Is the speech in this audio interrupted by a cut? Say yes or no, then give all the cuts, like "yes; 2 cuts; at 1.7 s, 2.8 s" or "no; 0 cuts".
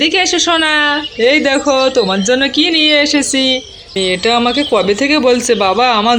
yes; 1 cut; at 3.9 s